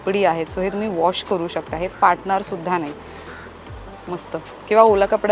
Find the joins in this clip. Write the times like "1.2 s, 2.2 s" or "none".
none